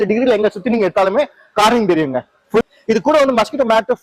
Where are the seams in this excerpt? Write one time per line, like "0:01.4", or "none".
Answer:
0:02.6